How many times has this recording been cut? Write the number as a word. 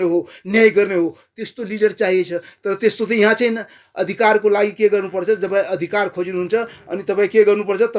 one